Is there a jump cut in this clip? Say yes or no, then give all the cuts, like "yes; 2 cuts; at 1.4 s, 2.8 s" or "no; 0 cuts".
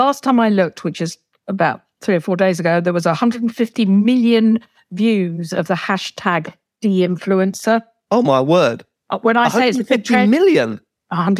yes; 2 cuts; at 6.6 s, 7.9 s